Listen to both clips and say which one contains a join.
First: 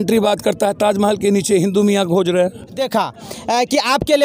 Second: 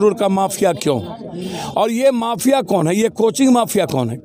first; 1 cut; at 2.8 s

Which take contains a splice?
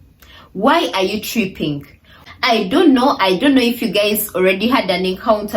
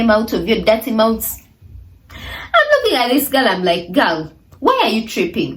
first; 1 cut; at 2.2 s

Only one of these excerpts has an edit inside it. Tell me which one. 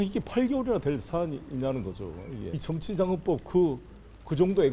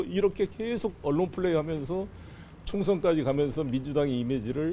first; 1 cut; at 2.5 s

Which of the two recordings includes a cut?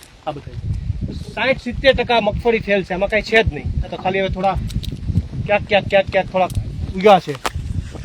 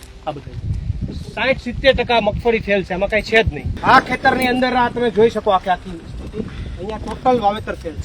second; 1 cut; at 3.7 s

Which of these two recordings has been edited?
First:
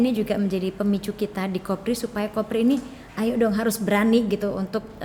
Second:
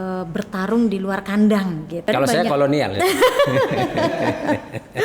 second; 1 cut; at 2.1 s

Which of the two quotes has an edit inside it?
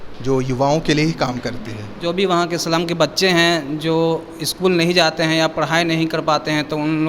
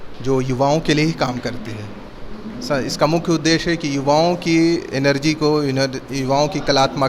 first; 1 cut; at 2.0 s

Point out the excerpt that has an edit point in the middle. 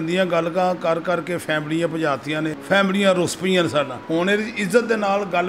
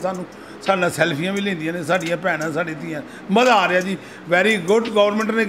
first; 2 cuts; at 2.6 s, 4.0 s

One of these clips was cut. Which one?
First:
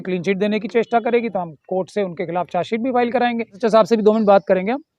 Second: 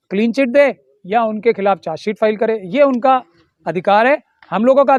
first; 1 cut; at 3.6 s

